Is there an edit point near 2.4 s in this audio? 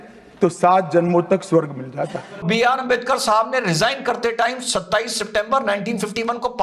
yes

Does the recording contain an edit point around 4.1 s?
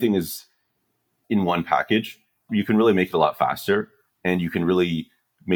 no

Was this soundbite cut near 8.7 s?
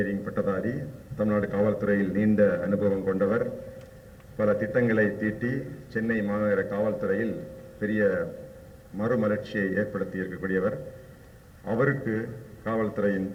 no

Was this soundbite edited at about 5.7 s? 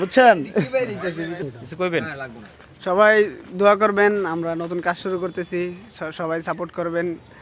no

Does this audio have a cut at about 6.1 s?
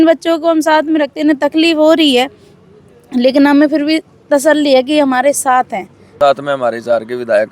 yes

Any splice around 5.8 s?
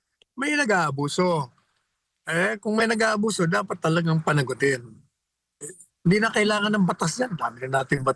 no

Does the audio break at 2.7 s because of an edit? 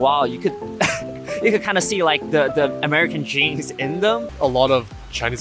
no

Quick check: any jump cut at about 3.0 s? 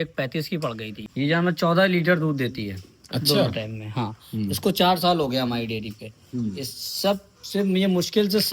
no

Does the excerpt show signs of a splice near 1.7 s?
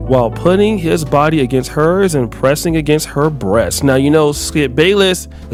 no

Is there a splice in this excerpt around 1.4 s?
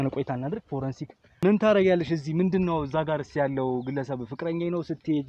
yes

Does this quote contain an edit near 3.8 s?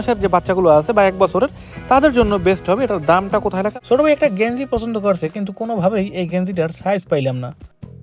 yes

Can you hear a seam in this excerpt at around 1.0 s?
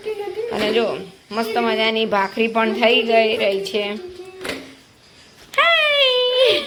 no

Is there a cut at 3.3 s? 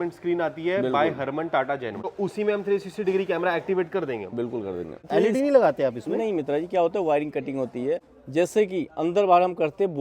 no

